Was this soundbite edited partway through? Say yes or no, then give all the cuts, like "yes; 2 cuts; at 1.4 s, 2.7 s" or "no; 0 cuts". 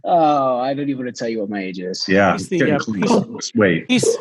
no; 0 cuts